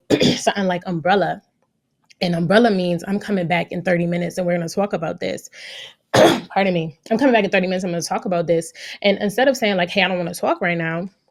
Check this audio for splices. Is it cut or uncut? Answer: uncut